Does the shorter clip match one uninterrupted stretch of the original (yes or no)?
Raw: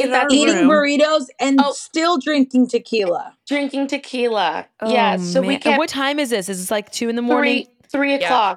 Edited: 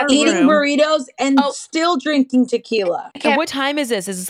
no